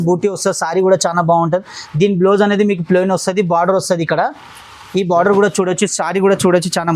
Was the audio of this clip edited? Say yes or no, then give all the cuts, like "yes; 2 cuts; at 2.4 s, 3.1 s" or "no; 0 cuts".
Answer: no; 0 cuts